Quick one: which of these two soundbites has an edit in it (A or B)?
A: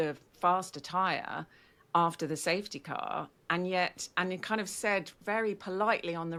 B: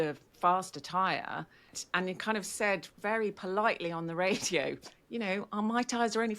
B